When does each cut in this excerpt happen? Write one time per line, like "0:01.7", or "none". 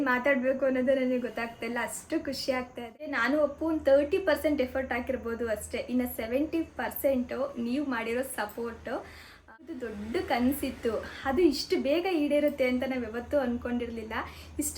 0:03.2
0:09.7